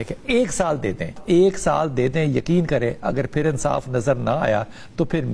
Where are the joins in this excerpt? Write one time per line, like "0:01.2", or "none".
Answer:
0:01.2